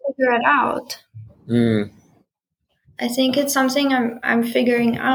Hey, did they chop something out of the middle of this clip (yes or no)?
no